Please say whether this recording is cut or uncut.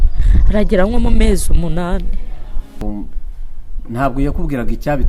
cut